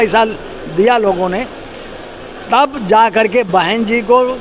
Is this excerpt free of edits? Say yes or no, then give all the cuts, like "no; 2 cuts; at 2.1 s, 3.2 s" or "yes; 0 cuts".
yes; 0 cuts